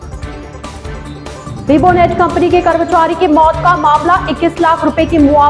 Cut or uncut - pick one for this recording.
cut